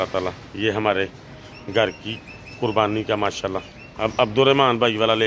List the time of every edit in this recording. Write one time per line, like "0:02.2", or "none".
0:03.9